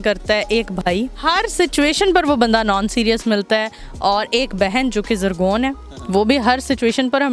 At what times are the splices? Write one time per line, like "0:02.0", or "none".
none